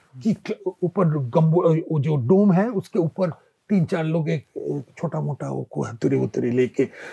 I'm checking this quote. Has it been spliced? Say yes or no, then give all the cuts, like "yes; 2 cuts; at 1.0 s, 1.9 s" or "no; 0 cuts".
no; 0 cuts